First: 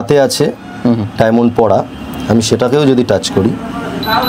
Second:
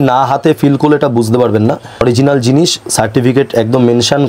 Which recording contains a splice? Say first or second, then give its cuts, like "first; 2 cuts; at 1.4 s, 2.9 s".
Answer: second; 1 cut; at 2.0 s